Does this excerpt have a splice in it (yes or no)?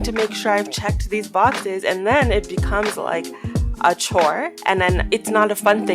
yes